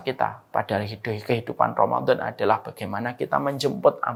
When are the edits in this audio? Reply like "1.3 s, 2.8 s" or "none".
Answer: none